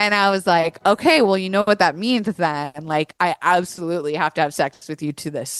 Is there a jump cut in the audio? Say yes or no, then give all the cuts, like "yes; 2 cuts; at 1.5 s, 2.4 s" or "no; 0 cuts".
no; 0 cuts